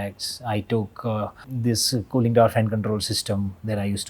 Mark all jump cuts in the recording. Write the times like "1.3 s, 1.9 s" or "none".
1.5 s